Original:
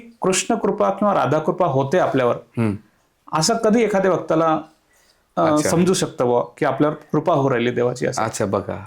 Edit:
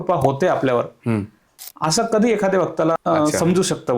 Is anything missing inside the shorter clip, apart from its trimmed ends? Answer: yes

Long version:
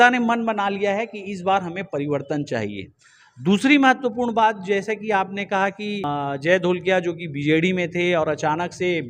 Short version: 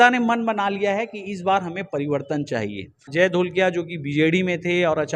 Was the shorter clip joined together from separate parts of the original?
yes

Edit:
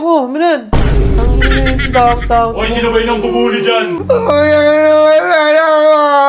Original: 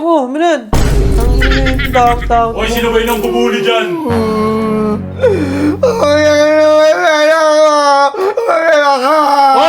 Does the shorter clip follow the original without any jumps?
no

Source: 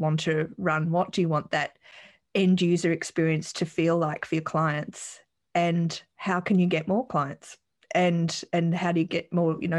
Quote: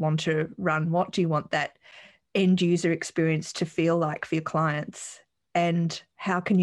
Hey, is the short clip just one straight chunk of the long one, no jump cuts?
yes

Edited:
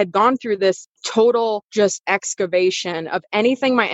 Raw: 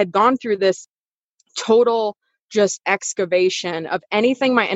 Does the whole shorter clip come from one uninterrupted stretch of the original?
no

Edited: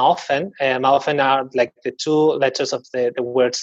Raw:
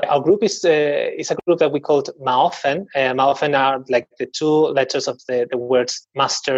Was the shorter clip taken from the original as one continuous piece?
yes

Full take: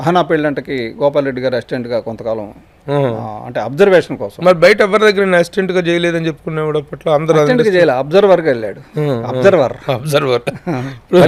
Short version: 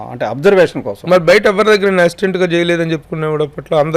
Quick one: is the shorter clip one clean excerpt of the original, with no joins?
yes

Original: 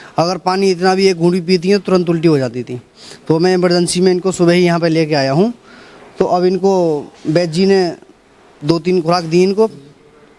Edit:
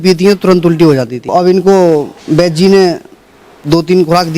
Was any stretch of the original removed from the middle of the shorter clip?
yes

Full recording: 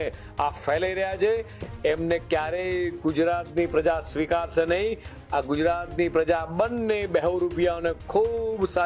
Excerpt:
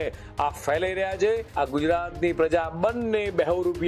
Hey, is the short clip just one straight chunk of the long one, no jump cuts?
no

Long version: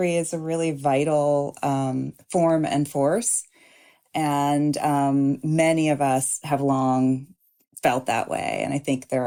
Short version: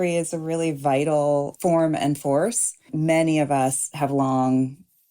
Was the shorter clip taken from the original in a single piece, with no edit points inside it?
no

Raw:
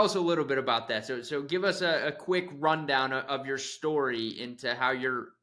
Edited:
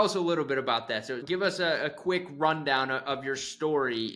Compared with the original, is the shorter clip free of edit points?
no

